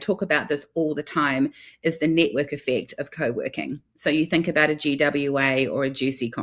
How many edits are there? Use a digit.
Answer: 0